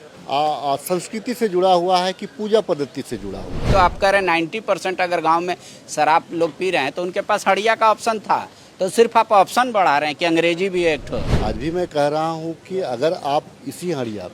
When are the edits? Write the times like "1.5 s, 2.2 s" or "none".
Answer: 3.7 s, 11.3 s

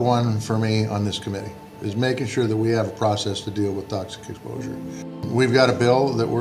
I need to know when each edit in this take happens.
5.3 s

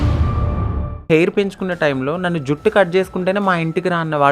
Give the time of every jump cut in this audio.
1.1 s

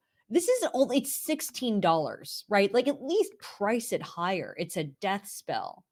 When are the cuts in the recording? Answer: none

